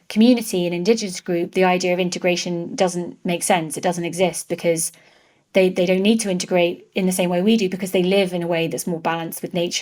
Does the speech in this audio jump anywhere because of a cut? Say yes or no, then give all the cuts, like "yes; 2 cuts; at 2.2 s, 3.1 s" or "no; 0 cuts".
no; 0 cuts